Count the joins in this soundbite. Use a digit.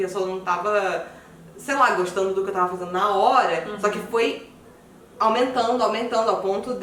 0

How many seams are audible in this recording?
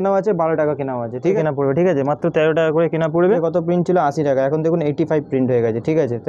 2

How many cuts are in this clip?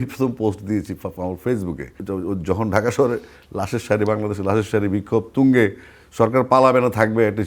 1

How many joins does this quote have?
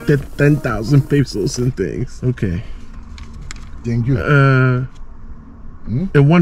1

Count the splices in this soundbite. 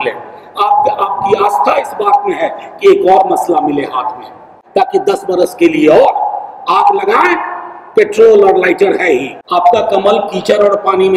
2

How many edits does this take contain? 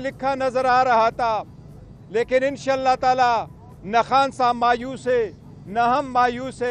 0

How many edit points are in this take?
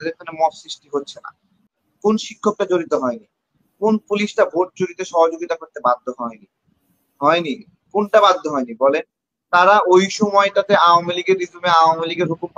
1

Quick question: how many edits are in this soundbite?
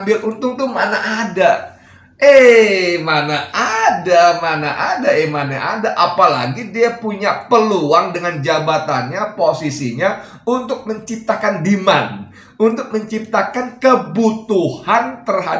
0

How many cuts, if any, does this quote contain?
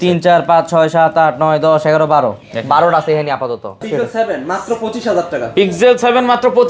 1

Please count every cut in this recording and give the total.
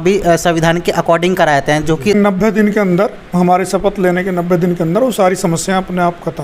1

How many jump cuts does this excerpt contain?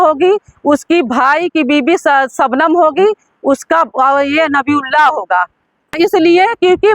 1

